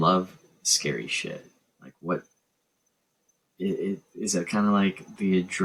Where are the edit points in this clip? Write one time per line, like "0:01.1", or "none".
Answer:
none